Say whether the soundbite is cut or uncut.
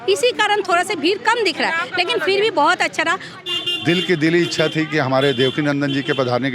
cut